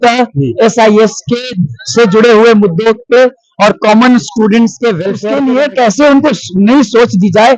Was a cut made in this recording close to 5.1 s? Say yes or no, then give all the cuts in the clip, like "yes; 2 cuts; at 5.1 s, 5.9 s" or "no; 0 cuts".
yes; 1 cut; at 5.1 s